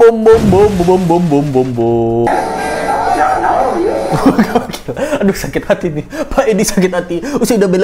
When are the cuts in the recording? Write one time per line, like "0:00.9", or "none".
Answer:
0:02.3